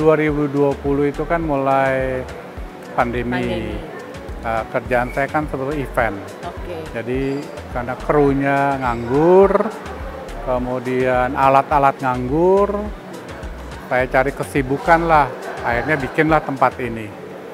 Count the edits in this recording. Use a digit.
0